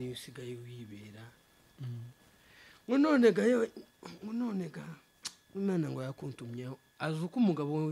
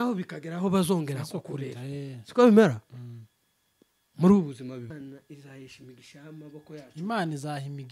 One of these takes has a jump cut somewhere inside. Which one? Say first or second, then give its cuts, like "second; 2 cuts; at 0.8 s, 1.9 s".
second; 1 cut; at 4.9 s